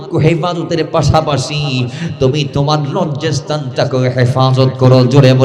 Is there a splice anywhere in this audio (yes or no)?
no